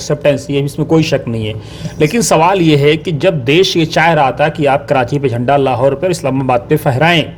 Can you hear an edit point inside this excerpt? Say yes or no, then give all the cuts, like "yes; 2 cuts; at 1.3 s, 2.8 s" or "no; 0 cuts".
no; 0 cuts